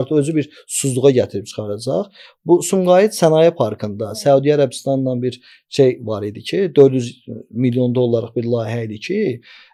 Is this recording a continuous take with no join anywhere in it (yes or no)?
yes